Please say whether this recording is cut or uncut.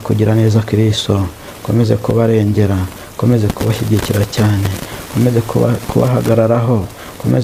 uncut